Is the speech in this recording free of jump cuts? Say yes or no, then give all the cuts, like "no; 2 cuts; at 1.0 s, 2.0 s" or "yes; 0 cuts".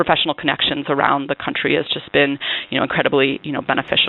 yes; 0 cuts